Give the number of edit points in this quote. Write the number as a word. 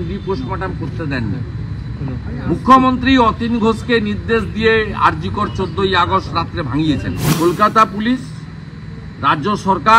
one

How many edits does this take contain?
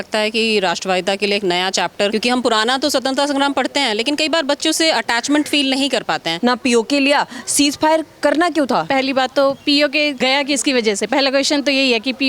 four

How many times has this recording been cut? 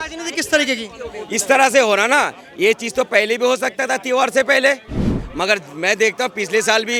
zero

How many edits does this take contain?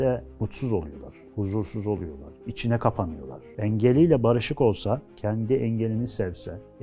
two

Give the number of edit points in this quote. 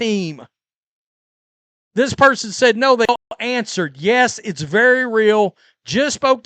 one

